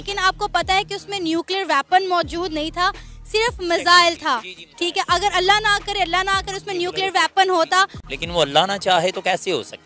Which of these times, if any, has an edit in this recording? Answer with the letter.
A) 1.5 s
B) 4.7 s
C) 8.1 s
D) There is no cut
C